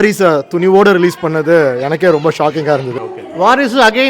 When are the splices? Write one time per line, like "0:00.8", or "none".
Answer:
0:02.9